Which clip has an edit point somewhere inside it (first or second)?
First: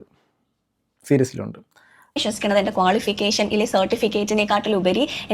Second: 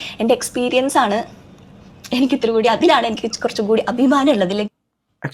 first